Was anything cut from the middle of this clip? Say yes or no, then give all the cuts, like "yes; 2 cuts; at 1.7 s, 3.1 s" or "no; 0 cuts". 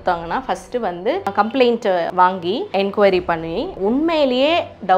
yes; 3 cuts; at 1.2 s, 2.1 s, 3.7 s